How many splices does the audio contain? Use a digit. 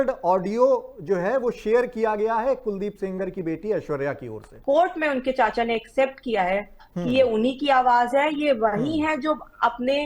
1